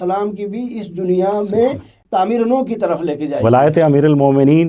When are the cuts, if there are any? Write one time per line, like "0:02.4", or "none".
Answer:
0:01.9
0:03.4